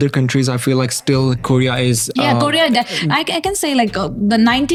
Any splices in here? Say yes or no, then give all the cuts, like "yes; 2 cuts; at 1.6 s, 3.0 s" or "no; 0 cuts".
no; 0 cuts